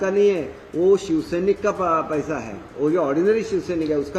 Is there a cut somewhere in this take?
no; 0 cuts

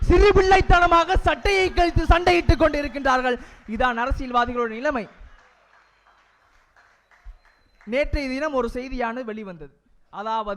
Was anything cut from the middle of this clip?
no; 0 cuts

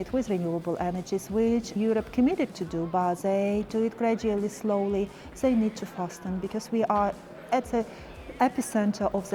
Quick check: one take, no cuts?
no; 1 cut; at 1.8 s

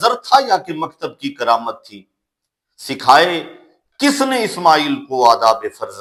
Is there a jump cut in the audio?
no; 0 cuts

